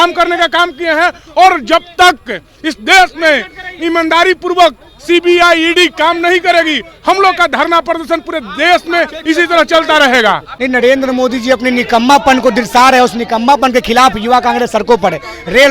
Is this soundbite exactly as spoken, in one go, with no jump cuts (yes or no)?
no